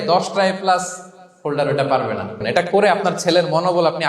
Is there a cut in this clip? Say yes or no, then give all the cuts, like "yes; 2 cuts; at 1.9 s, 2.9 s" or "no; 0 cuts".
yes; 1 cut; at 2.4 s